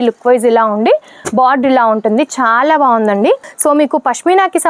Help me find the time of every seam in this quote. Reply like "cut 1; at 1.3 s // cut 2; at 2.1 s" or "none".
cut 1; at 3.5 s